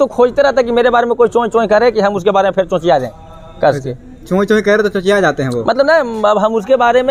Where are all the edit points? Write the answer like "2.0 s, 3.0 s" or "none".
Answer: none